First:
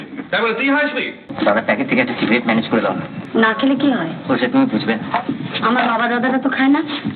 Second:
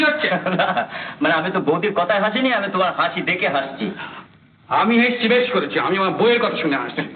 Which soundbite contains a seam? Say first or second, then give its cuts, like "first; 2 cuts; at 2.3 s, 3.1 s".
first; 2 cuts; at 1.2 s, 3.1 s